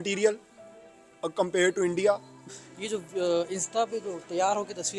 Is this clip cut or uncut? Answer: cut